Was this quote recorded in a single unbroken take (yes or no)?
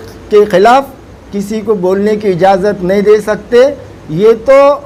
yes